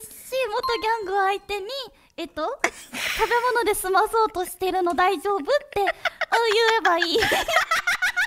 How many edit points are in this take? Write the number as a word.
zero